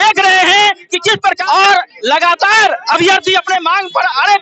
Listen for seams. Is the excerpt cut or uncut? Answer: cut